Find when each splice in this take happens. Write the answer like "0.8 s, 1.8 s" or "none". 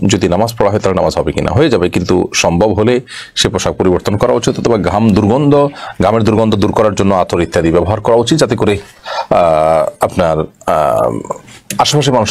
none